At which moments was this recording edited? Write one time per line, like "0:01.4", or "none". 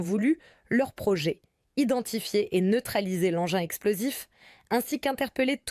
none